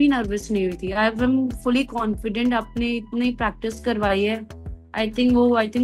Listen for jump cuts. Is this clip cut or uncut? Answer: uncut